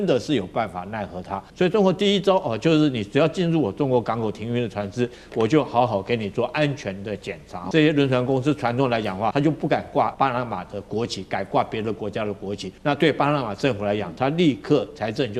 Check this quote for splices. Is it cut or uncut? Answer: cut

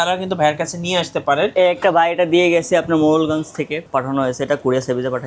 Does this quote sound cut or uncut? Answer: cut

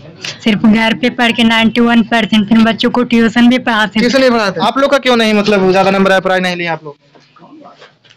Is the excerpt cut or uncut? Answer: cut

